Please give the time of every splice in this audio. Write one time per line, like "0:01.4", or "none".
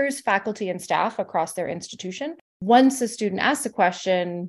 0:02.5